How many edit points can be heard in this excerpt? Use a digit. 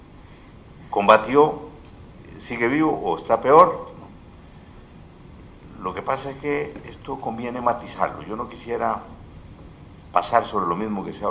1